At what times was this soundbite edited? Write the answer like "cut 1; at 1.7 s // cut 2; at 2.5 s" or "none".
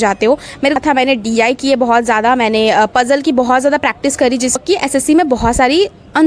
cut 1; at 0.8 s // cut 2; at 4.6 s